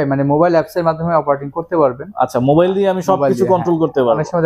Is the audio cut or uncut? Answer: uncut